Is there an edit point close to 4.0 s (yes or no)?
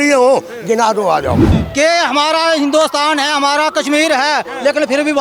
no